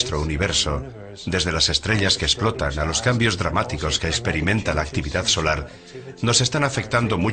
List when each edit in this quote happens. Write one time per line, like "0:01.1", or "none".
0:02.5